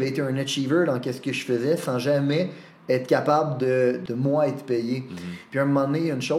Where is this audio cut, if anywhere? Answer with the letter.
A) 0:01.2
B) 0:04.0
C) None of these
B